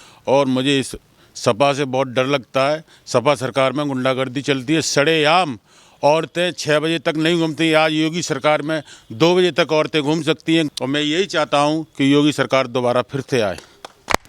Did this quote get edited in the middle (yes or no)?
yes